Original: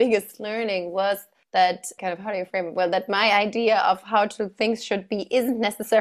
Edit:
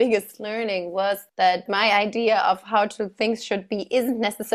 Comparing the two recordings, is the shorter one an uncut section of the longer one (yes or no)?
no